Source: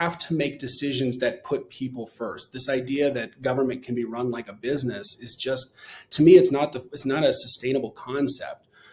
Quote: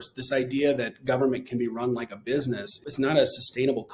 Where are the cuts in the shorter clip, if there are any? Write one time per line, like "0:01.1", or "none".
0:02.8